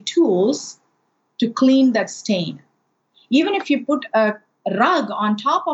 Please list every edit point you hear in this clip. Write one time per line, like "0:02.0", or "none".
0:03.1